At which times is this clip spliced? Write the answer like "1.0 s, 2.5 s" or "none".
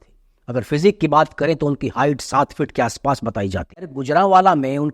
4.0 s